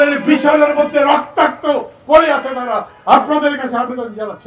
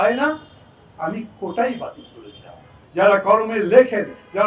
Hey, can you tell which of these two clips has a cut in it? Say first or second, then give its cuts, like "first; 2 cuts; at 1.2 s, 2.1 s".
second; 1 cut; at 2.7 s